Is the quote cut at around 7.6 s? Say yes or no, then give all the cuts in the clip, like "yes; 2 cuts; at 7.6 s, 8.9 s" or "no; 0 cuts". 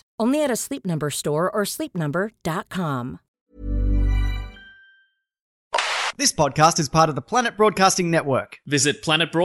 no; 2 cuts; at 3.4 s, 5.8 s